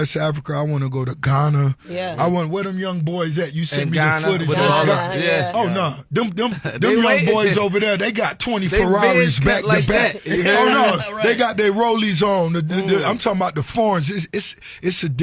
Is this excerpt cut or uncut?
uncut